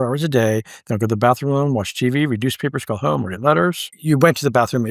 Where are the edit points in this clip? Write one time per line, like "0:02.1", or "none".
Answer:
0:03.9